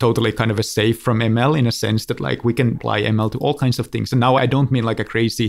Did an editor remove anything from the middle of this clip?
yes; 2 cuts; at 1.0 s, 4.4 s

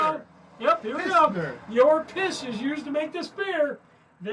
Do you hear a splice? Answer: no; 0 cuts

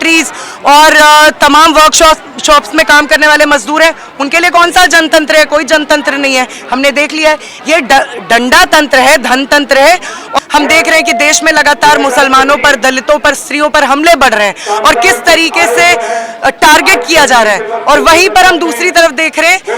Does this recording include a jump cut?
yes; 1 cut; at 10.2 s

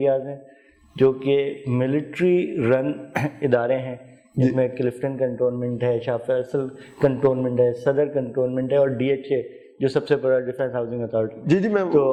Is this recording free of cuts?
yes; 0 cuts

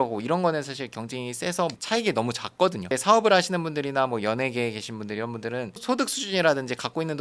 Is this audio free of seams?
yes; 0 cuts

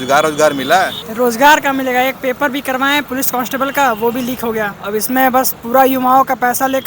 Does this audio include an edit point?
yes; 3 cuts; at 1.0 s, 3.1 s, 4.8 s

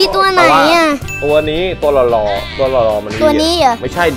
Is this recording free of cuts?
yes; 0 cuts

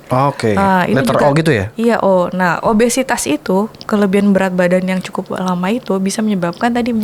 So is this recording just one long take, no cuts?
yes; 0 cuts

